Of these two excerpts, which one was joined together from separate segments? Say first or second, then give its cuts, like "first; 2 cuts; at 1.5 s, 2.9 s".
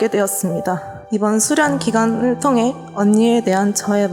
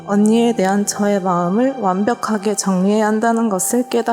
first; 1 cut; at 0.9 s